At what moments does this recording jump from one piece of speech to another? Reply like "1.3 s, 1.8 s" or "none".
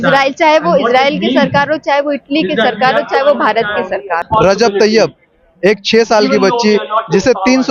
4.2 s

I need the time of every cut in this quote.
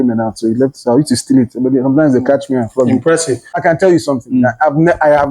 3.5 s

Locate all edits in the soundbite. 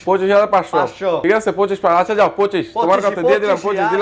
1.2 s

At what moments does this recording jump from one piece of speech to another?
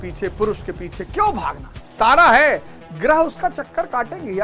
1.8 s

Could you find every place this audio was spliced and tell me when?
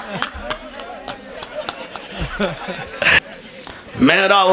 3.2 s

